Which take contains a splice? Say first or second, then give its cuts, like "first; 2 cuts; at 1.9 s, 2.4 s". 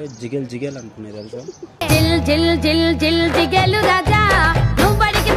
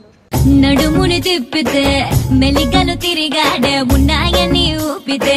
first; 1 cut; at 1.1 s